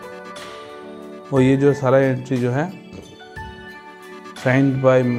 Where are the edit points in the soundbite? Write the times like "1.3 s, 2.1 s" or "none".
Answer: none